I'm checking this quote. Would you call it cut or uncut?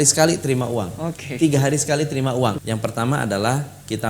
cut